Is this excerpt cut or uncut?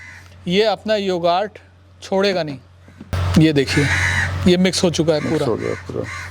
cut